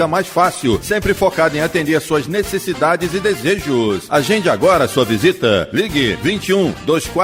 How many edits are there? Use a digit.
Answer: 0